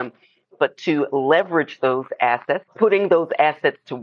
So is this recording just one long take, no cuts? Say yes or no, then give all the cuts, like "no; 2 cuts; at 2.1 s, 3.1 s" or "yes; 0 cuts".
no; 1 cut; at 2.7 s